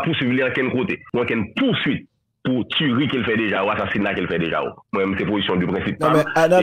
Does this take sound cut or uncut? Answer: cut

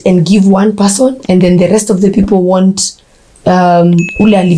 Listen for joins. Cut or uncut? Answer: uncut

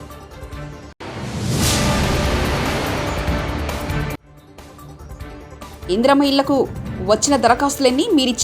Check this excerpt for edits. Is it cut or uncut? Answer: cut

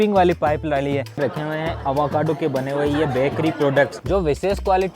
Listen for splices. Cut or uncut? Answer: cut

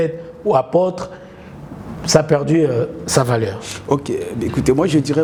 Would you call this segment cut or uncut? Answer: uncut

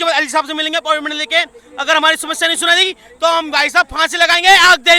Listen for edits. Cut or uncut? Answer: uncut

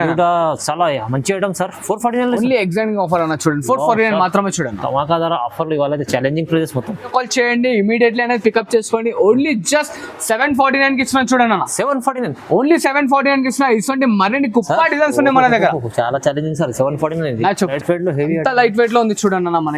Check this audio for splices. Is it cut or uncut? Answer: cut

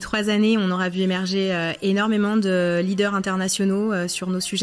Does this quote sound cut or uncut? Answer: uncut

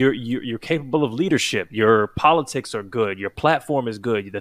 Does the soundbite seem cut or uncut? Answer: uncut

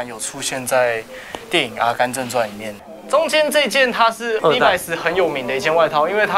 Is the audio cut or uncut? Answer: cut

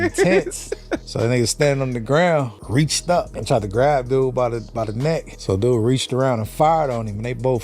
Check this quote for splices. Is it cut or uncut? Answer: cut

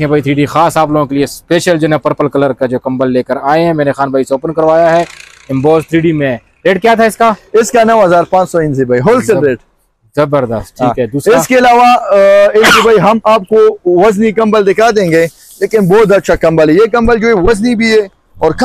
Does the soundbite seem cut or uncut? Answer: uncut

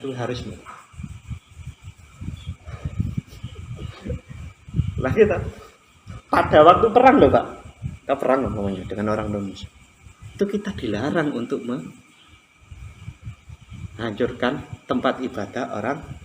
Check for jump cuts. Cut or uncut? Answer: uncut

